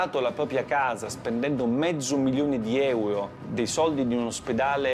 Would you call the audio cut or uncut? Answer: cut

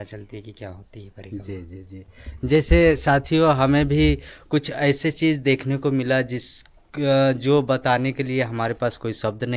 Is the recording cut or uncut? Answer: uncut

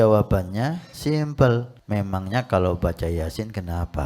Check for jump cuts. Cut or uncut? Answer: cut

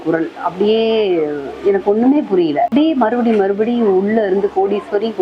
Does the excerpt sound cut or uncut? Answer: cut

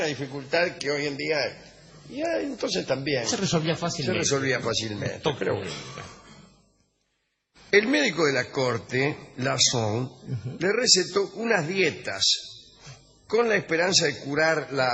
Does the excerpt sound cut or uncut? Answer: uncut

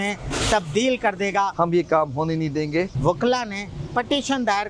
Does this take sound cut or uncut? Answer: cut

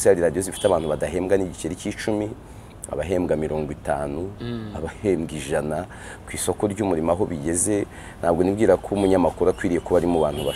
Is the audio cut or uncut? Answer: uncut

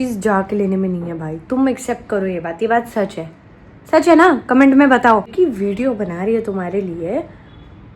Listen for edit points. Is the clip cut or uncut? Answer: cut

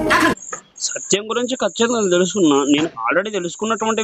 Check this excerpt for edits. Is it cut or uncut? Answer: uncut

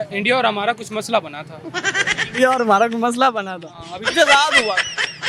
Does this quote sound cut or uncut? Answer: uncut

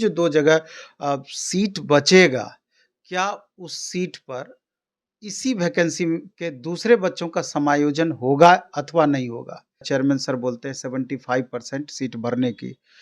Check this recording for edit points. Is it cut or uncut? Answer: cut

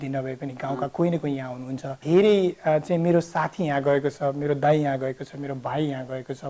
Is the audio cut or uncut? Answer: cut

